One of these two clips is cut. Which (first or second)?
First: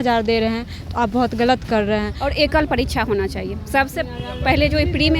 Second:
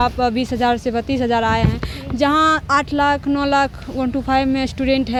first